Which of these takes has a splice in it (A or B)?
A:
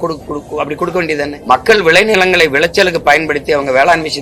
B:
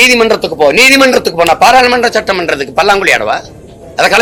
A